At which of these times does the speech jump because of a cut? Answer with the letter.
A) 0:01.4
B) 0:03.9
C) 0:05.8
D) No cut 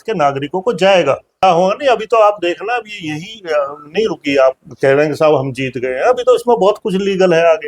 A